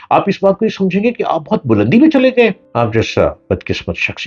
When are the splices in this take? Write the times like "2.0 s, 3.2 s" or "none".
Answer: 2.6 s

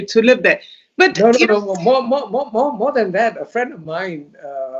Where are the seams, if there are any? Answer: none

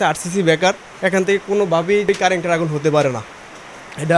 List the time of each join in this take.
2.1 s

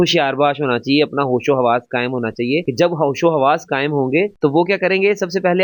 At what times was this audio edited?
none

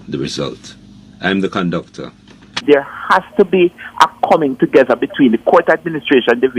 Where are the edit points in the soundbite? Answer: 2.6 s

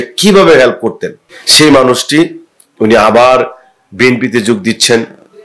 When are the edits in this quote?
2.6 s

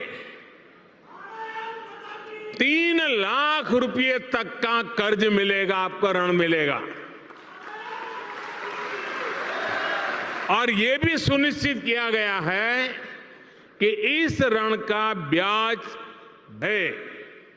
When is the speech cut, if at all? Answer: 16.6 s

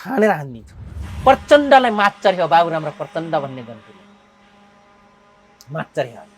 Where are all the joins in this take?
1.0 s

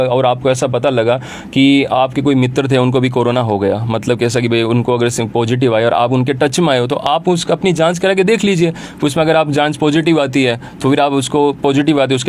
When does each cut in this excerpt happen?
none

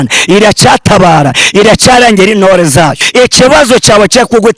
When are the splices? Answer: 3.0 s

